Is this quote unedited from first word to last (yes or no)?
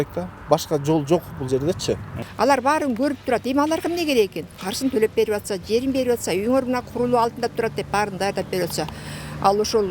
no